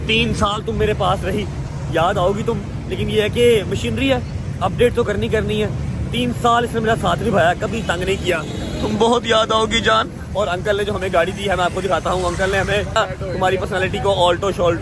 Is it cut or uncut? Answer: uncut